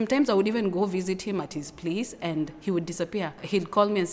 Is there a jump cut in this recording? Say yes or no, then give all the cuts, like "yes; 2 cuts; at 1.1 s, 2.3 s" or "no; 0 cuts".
no; 0 cuts